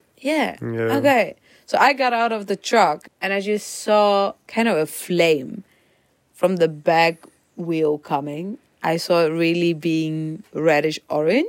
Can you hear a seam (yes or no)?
yes